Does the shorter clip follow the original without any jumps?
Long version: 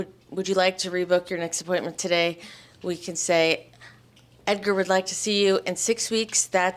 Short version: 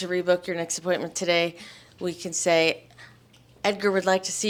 yes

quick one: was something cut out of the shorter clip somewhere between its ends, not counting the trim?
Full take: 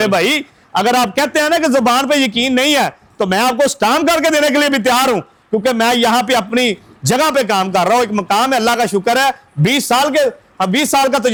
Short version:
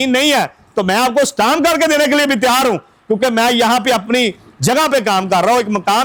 no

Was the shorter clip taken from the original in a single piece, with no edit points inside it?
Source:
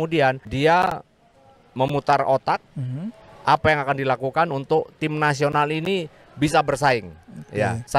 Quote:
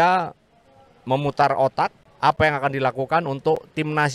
no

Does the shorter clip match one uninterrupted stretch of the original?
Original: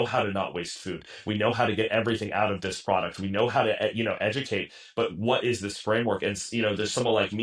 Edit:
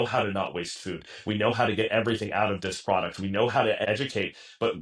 no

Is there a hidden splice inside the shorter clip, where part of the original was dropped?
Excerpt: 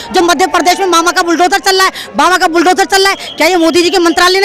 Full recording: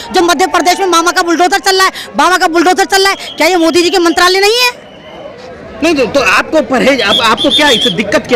no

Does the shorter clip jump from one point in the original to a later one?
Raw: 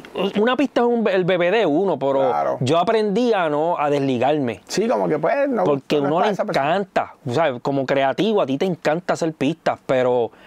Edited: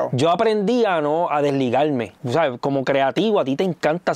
yes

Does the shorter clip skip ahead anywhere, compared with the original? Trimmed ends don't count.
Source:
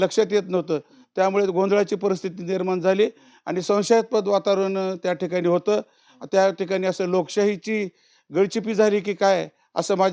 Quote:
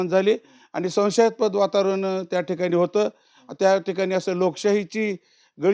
no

